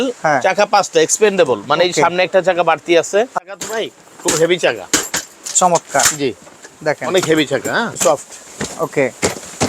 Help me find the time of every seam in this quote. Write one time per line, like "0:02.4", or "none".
0:03.4
0:07.9

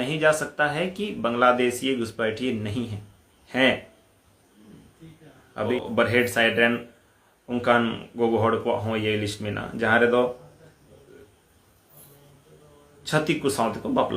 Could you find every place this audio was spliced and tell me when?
0:05.7

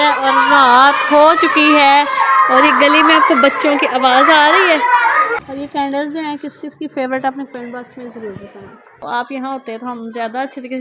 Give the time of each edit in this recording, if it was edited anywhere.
0:05.4
0:09.0

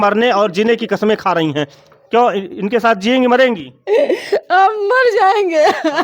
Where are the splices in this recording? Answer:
none

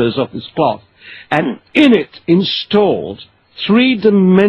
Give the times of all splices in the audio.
none

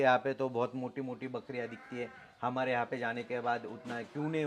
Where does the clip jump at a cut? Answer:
none

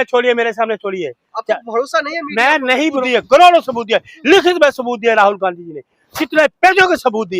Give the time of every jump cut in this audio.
0:03.0

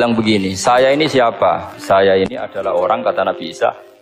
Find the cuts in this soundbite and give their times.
none

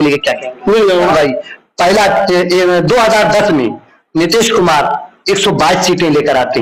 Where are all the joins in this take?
0:01.1

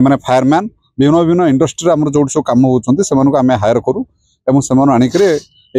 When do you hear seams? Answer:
none

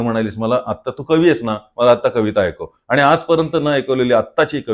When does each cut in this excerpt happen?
none

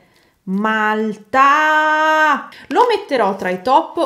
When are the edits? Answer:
0:02.4

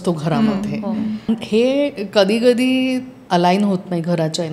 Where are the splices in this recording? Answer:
0:01.3
0:03.1

